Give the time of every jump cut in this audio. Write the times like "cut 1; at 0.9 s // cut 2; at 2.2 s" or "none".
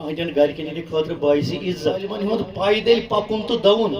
cut 1; at 2.2 s